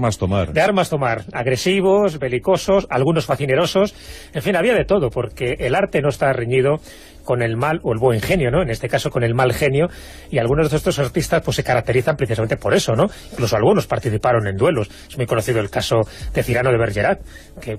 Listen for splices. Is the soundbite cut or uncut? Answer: uncut